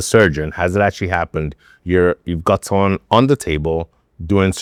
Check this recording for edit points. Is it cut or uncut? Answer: uncut